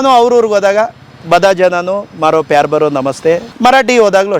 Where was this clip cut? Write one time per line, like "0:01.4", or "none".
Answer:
0:03.5